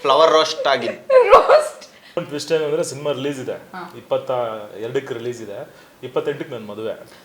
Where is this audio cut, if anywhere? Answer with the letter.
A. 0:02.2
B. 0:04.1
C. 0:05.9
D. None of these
A